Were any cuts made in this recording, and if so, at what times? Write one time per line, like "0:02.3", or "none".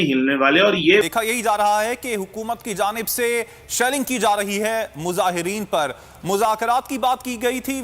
0:01.0